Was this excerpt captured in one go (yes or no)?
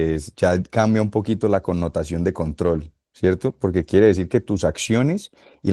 yes